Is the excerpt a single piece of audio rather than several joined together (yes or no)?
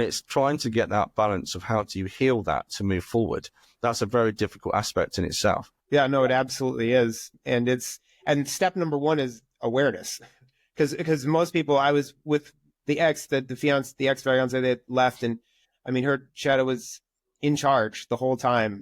no